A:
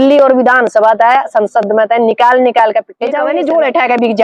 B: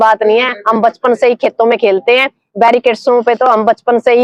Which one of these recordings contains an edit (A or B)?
A